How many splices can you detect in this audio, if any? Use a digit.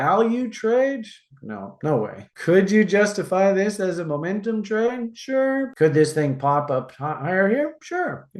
1